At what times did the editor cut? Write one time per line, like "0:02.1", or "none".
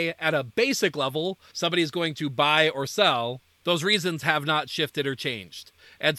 0:01.5
0:03.5